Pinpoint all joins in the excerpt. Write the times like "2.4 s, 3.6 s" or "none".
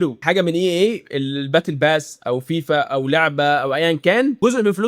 none

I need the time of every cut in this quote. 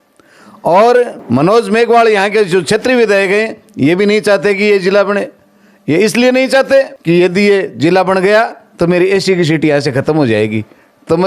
1.2 s, 7.0 s

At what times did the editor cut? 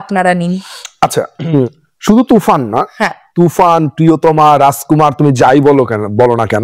none

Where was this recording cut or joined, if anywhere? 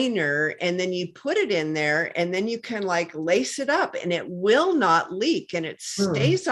none

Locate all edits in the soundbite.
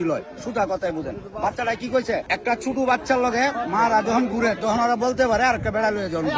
2.3 s

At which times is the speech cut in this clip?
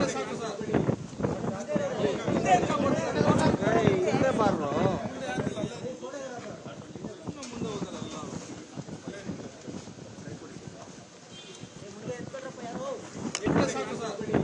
13.4 s

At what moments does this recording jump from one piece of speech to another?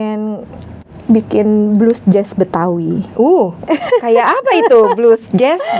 none

